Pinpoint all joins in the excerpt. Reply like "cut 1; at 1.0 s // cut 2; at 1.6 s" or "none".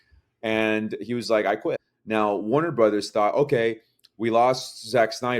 cut 1; at 1.9 s